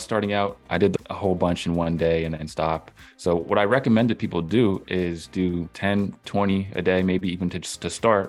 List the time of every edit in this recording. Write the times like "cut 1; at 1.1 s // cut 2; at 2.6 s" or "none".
cut 1; at 1.0 s // cut 2; at 5.7 s